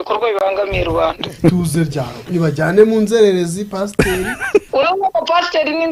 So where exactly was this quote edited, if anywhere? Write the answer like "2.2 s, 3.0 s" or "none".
1.4 s, 4.7 s